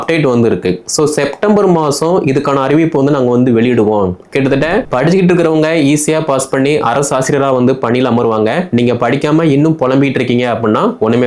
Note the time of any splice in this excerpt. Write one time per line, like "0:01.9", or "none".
0:04.9